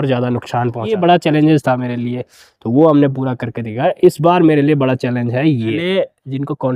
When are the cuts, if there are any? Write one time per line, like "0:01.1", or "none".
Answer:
0:00.9
0:05.9